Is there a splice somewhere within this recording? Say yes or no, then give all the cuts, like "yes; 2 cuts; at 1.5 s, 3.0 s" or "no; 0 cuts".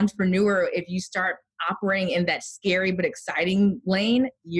no; 0 cuts